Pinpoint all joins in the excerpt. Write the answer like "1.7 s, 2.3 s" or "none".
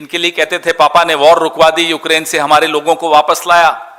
none